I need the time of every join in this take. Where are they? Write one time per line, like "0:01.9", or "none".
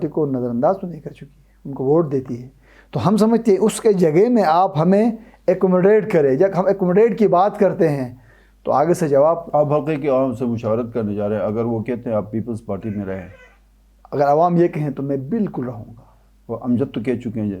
none